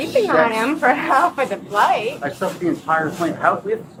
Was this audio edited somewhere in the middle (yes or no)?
no